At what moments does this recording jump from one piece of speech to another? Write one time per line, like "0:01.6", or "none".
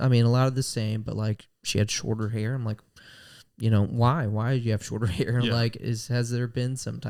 none